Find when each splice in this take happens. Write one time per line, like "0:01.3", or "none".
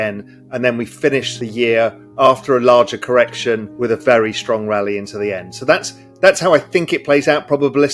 0:01.4
0:03.7